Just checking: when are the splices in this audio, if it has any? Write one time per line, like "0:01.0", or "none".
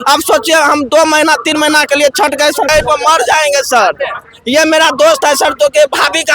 0:02.7